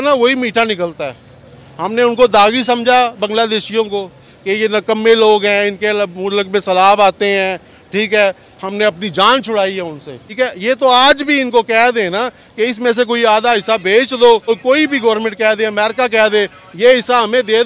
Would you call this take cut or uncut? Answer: cut